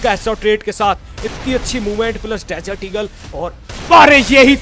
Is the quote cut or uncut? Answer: uncut